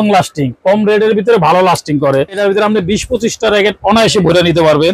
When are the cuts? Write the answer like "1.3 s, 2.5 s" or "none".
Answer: 2.4 s